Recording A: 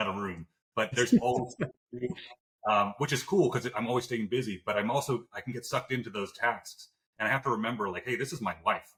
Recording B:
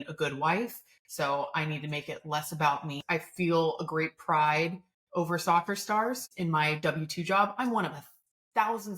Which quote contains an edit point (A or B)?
B